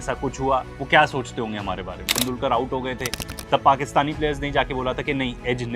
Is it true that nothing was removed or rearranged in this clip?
no; 1 cut; at 2.1 s

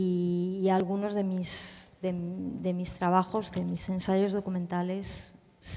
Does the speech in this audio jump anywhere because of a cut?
no; 0 cuts

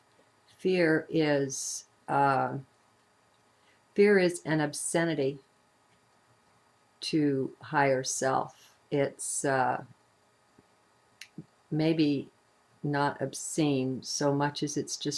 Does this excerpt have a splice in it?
yes; 1 cut; at 2.4 s

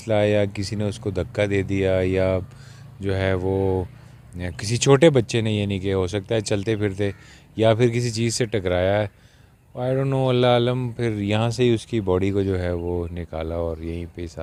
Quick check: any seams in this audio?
no; 0 cuts

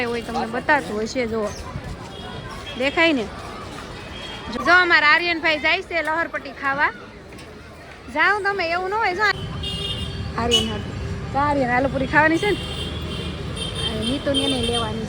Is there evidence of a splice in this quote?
yes; 2 cuts; at 4.6 s, 9.3 s

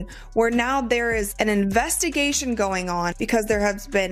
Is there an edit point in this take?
yes; 1 cut; at 3.2 s

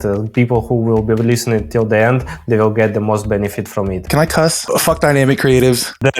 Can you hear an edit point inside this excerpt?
yes; 1 cut; at 4.0 s

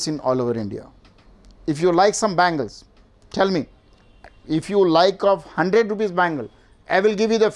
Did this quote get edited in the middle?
no; 0 cuts

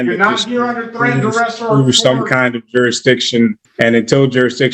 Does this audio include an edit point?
yes; 1 cut; at 3.6 s

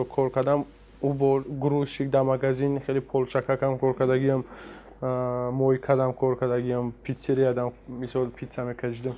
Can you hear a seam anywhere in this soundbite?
no; 0 cuts

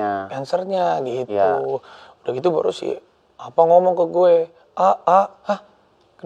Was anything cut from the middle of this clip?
no; 0 cuts

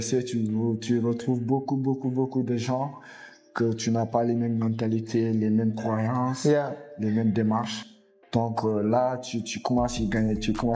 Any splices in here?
no; 0 cuts

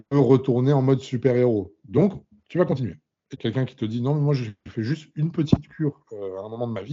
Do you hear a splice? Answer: yes; 1 cut; at 3.3 s

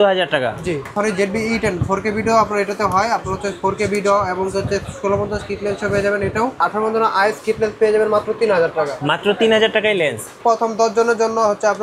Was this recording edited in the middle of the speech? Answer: yes; 3 cuts; at 0.9 s, 6.6 s, 10.3 s

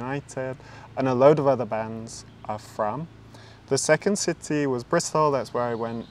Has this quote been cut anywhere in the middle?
no; 0 cuts

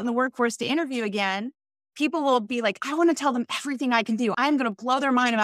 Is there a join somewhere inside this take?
yes; 1 cut; at 4.3 s

